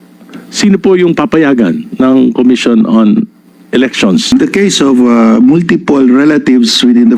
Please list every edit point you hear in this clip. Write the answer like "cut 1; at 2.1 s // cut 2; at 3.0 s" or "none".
cut 1; at 4.3 s